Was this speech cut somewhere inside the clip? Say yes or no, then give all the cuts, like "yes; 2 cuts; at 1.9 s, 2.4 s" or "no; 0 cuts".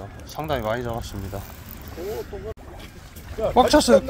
yes; 1 cut; at 2.6 s